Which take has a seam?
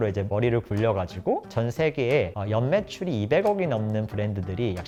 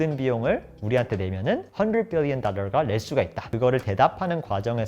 second; 2 cuts; at 1.7 s, 3.4 s

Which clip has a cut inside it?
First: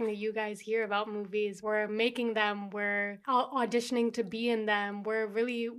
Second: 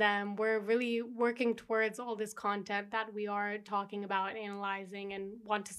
first; 2 cuts; at 1.6 s, 3.2 s

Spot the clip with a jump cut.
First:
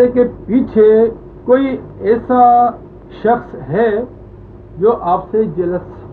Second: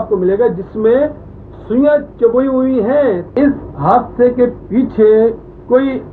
second; 1 cut; at 3.3 s

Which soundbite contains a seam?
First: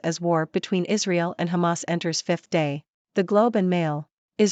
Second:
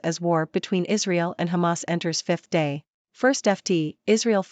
second; 1 cut; at 3.0 s

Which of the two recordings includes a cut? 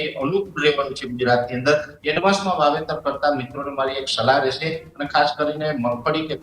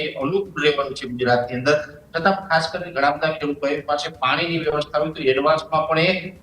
first; 2 cuts; at 1.9 s, 4.9 s

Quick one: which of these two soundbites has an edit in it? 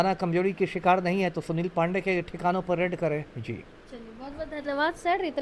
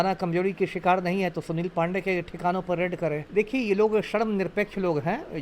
second; 1 cut; at 3.2 s

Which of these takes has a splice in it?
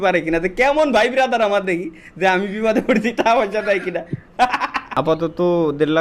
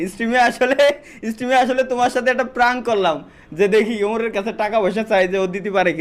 first; 1 cut; at 4.8 s

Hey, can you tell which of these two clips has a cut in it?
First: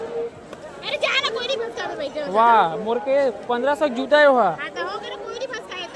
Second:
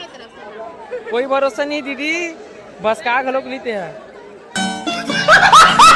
second; 1 cut; at 4.5 s

